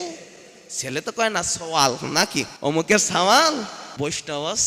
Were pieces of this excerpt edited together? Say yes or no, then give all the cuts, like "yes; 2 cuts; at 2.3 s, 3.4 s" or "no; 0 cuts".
yes; 2 cuts; at 2.5 s, 3.8 s